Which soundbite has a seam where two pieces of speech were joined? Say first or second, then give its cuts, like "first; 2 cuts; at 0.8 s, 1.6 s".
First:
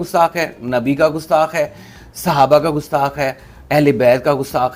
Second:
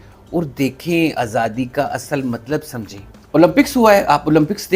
second; 1 cut; at 3.2 s